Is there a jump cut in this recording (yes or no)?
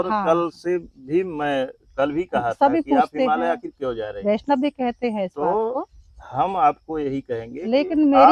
no